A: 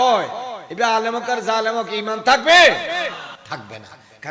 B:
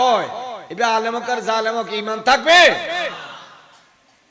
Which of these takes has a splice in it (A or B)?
A